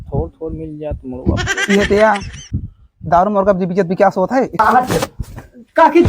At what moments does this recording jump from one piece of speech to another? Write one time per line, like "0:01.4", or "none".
0:04.6